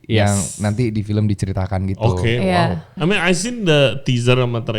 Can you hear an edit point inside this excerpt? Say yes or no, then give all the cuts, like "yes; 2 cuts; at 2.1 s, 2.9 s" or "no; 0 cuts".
yes; 1 cut; at 2.9 s